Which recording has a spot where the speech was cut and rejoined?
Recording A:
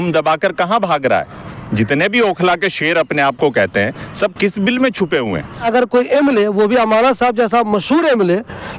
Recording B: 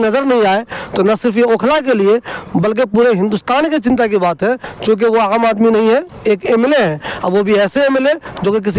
A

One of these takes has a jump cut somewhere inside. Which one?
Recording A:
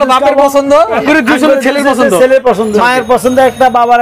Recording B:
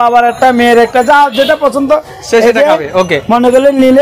A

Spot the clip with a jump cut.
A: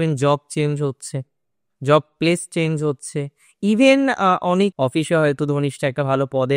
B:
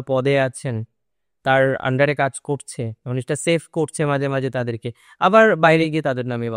A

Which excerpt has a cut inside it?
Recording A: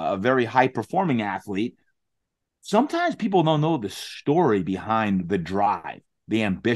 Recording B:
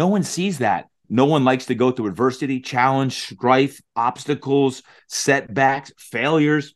B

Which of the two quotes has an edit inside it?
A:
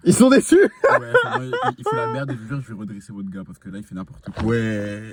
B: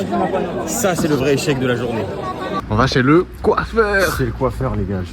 B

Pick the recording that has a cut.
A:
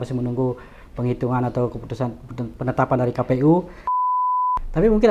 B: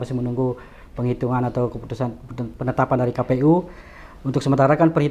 A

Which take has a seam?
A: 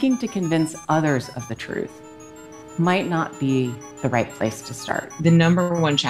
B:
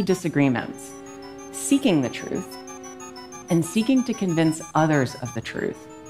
A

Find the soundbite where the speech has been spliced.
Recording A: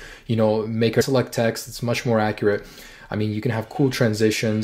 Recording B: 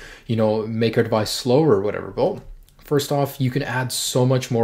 B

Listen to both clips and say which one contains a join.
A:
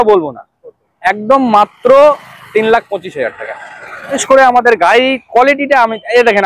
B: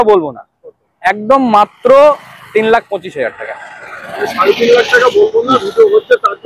A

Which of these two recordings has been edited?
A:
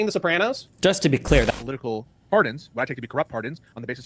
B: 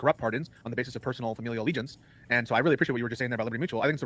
A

